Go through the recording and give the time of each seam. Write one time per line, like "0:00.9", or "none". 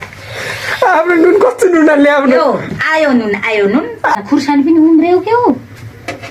0:04.2